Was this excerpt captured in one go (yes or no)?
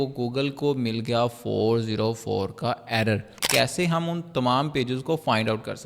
no